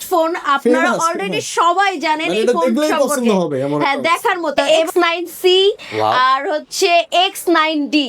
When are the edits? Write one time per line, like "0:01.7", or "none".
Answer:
0:04.6